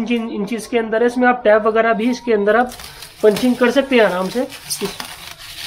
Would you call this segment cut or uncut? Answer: uncut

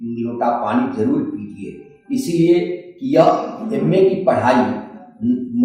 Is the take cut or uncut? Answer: uncut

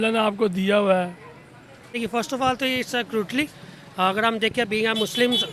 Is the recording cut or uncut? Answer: cut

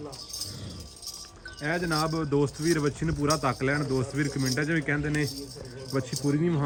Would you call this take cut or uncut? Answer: uncut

